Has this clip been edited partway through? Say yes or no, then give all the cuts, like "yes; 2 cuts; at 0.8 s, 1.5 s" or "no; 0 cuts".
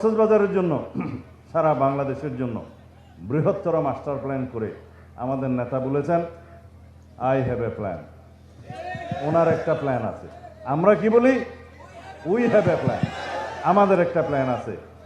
no; 0 cuts